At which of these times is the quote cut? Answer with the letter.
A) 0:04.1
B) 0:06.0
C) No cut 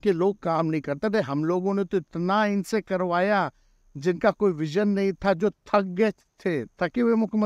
C